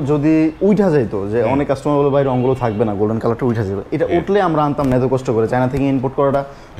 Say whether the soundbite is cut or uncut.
uncut